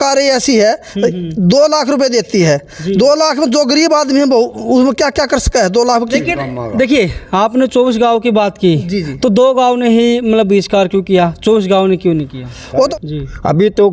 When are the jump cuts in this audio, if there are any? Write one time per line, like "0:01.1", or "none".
0:06.1
0:12.9